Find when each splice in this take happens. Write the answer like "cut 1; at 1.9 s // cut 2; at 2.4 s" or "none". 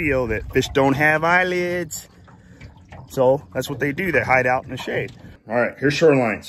cut 1; at 5.3 s